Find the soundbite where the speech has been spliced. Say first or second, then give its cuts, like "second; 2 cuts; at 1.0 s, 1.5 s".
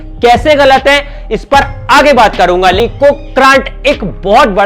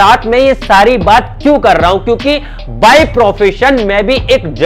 first; 1 cut; at 2.8 s